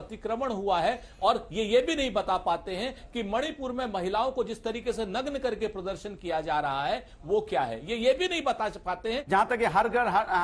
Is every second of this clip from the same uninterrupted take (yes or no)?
no